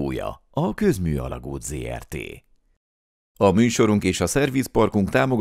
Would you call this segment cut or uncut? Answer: uncut